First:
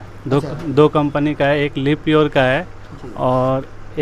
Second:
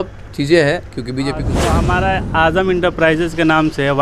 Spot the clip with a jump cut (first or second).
second